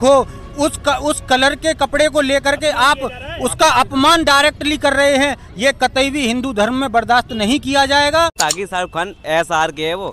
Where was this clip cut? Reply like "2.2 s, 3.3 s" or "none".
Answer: 8.4 s